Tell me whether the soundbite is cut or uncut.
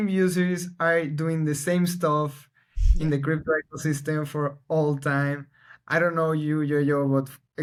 uncut